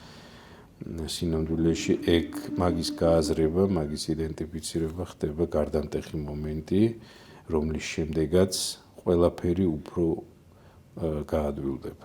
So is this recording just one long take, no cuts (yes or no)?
yes